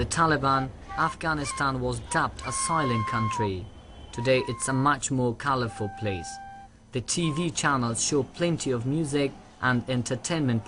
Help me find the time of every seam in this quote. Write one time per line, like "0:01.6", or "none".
none